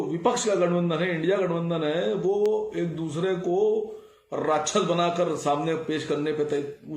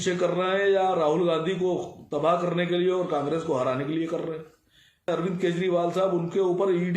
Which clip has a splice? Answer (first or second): second